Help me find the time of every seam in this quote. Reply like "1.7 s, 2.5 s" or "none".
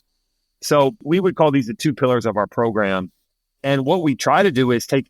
1.0 s